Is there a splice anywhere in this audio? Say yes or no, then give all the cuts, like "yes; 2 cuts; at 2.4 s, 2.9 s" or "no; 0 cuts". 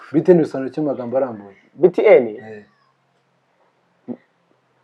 no; 0 cuts